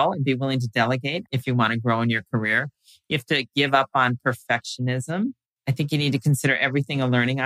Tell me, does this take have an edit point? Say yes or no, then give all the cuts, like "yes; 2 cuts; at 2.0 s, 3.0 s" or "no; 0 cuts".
yes; 2 cuts; at 1.5 s, 5.5 s